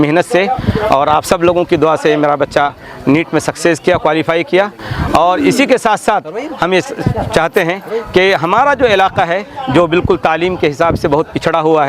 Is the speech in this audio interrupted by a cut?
no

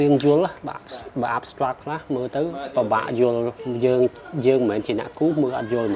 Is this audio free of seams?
no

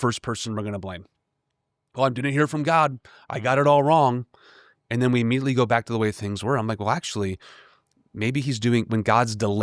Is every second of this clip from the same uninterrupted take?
yes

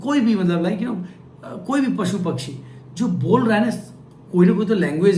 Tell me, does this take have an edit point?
no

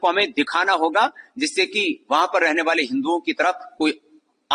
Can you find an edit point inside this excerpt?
no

